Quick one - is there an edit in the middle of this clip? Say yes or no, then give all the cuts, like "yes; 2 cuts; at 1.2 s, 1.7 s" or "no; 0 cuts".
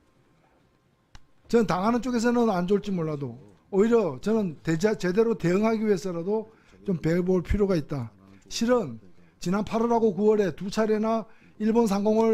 no; 0 cuts